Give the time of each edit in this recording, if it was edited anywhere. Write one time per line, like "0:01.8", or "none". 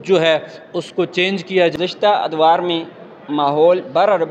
0:01.7